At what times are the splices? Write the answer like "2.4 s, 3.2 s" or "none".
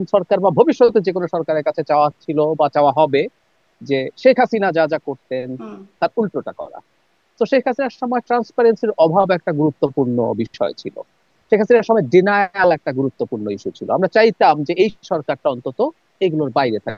none